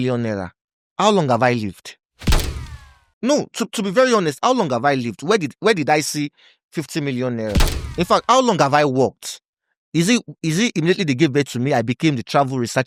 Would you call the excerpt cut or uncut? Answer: uncut